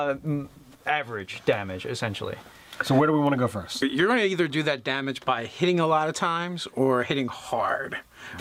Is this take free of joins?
yes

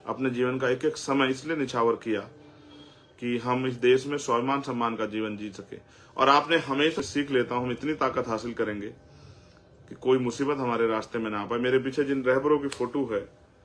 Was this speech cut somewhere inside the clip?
yes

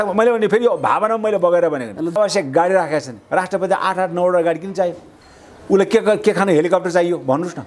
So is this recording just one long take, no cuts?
no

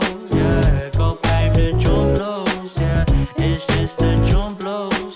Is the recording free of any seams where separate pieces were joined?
no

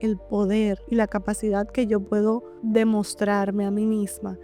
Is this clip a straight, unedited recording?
no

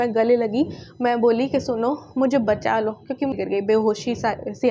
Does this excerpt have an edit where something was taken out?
yes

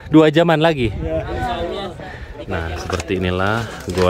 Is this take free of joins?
no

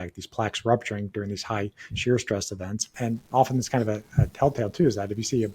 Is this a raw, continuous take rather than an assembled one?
no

